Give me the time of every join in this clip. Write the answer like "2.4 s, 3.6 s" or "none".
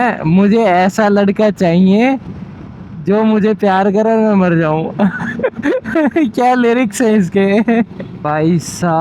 8.1 s